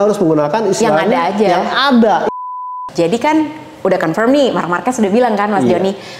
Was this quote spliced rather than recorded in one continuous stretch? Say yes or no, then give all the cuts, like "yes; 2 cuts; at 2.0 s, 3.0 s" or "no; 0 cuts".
yes; 1 cut; at 2.3 s